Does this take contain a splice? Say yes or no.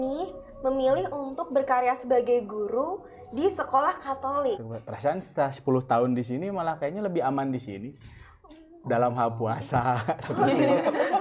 yes